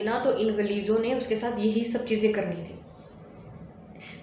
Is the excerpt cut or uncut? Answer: uncut